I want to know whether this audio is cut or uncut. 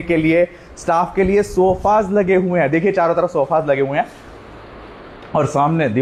uncut